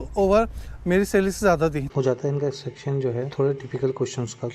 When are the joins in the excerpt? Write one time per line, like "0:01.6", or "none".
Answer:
0:01.9